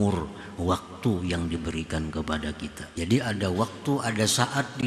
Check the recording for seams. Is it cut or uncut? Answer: cut